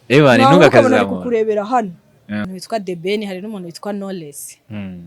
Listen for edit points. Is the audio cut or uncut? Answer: cut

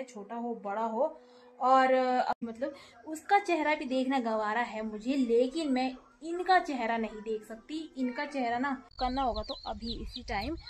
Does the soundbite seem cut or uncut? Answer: cut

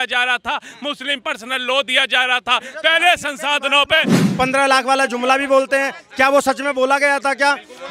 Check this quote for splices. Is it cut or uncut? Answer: cut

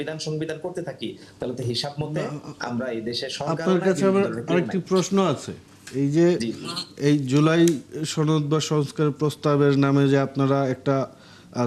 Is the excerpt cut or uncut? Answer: uncut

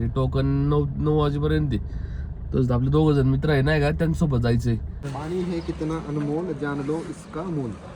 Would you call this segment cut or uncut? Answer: cut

